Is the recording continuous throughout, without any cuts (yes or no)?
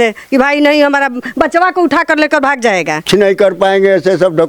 no